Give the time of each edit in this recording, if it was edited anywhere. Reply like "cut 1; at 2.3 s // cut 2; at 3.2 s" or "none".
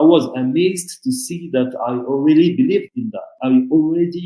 cut 1; at 3.3 s